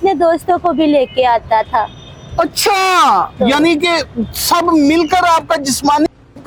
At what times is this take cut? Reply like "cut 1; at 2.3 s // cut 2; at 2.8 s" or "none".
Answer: none